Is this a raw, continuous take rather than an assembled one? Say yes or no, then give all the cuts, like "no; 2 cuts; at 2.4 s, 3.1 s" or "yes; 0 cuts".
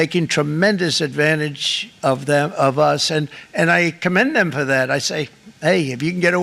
yes; 0 cuts